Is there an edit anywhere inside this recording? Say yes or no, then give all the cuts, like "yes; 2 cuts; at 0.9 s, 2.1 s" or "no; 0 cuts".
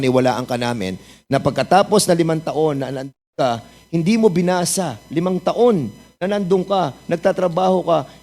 no; 0 cuts